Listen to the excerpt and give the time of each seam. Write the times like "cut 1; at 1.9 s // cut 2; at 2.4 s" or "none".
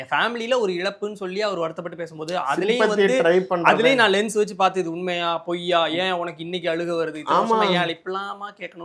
none